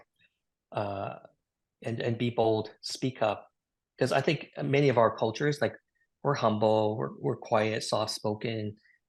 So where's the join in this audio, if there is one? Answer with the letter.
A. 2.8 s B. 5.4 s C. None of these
C